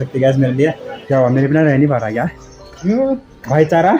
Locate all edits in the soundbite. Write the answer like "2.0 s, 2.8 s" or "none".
0.9 s